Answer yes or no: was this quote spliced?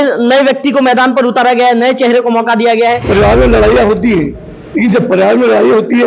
yes